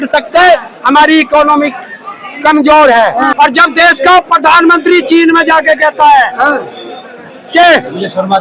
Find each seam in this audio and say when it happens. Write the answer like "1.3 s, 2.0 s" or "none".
3.3 s